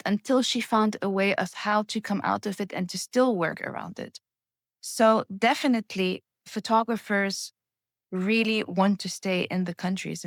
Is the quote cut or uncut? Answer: uncut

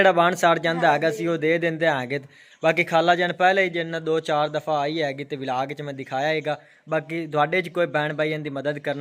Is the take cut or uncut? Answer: uncut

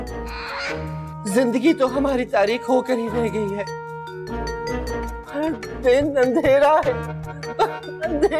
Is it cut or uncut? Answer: cut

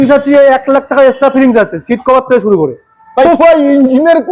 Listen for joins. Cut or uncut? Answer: cut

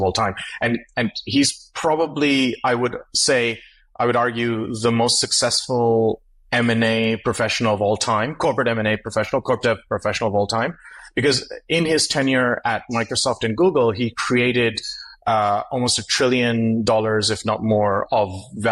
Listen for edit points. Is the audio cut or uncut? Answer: uncut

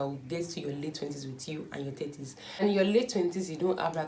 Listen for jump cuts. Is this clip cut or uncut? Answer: uncut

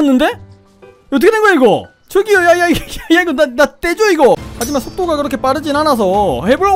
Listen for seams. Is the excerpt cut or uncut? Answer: cut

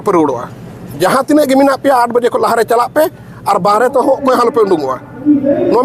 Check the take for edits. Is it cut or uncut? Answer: uncut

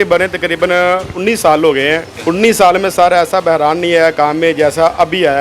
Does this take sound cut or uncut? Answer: cut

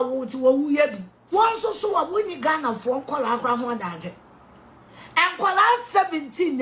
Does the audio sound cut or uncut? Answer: cut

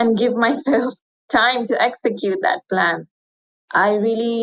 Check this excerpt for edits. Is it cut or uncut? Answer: cut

